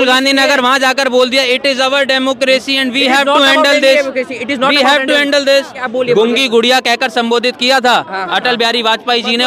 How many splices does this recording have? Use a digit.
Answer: 1